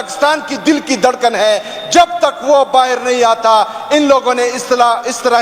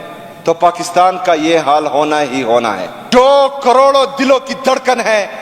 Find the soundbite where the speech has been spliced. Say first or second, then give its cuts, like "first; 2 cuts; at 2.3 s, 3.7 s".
second; 1 cut; at 2.9 s